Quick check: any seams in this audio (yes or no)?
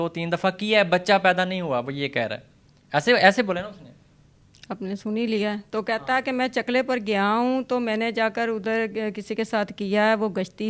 no